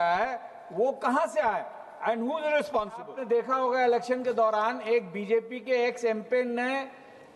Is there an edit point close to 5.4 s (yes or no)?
no